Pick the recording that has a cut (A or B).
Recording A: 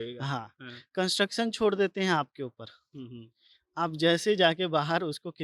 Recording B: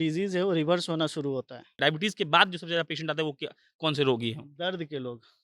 B